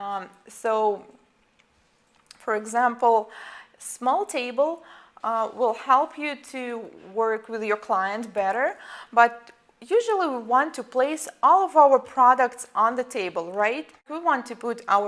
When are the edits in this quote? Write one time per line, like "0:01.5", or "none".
0:14.0